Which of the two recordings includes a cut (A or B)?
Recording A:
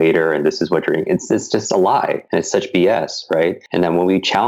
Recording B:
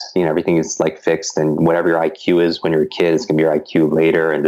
A